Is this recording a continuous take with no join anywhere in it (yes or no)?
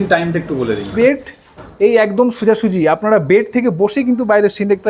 no